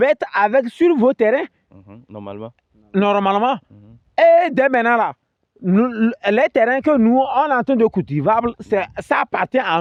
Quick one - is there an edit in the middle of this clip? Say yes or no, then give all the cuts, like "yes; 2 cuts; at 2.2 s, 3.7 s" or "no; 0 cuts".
no; 0 cuts